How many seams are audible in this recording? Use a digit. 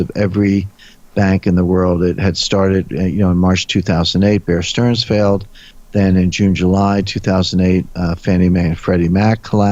0